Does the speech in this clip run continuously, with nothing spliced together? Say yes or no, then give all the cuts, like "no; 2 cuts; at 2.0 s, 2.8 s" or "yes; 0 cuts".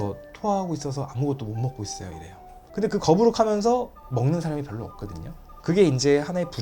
no; 1 cut; at 2.6 s